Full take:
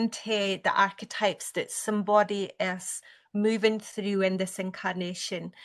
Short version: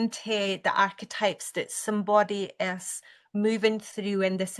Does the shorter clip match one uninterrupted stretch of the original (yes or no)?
yes